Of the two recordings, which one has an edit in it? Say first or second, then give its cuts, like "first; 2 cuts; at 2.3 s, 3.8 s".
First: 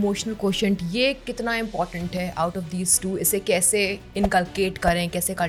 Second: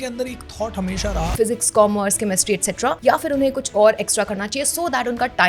second; 2 cuts; at 1.3 s, 3.0 s